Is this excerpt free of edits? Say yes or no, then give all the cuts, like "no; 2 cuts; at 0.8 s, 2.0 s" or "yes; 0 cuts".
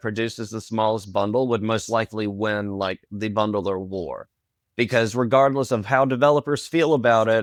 yes; 0 cuts